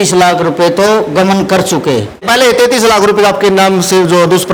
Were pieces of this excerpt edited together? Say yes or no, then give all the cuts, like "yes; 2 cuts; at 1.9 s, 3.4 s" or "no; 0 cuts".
no; 0 cuts